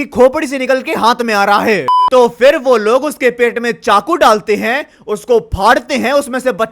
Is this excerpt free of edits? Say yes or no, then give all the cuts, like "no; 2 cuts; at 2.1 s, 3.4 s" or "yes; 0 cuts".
no; 1 cut; at 2.0 s